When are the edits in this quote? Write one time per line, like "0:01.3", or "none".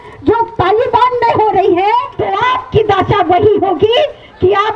0:02.2